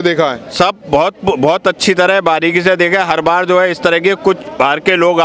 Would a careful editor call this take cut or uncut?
uncut